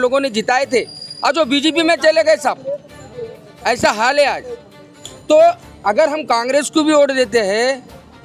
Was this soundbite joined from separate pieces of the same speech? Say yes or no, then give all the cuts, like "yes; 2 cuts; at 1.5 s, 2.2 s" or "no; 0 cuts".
no; 0 cuts